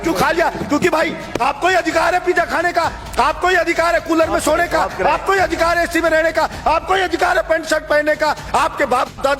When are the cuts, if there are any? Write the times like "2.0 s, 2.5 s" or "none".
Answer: none